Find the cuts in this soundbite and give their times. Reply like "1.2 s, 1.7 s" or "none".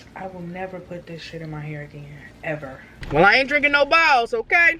2.9 s